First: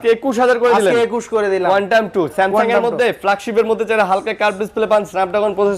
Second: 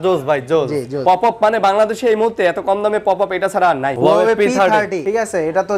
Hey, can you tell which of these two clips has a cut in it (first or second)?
second